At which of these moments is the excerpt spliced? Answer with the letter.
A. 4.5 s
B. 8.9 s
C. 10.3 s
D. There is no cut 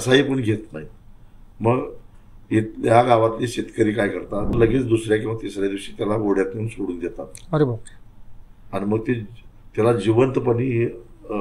A